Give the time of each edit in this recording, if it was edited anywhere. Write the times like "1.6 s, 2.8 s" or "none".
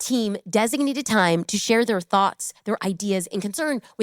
none